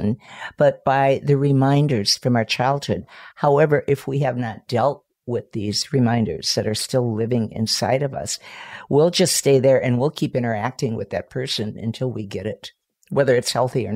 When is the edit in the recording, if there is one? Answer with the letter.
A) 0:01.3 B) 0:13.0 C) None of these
B